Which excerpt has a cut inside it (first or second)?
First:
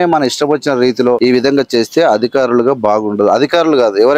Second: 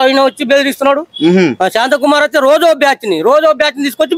first